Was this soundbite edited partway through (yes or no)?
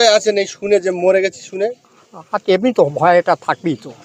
no